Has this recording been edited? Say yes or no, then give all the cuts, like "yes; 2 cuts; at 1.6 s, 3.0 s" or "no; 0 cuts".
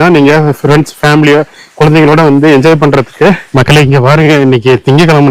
yes; 1 cut; at 3.5 s